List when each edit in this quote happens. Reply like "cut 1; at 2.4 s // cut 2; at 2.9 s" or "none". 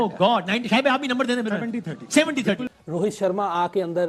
cut 1; at 2.6 s